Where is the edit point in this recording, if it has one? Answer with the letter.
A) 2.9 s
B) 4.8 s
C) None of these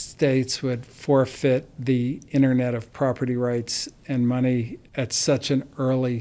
B